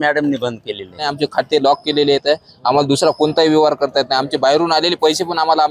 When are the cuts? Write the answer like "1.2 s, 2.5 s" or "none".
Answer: 1.1 s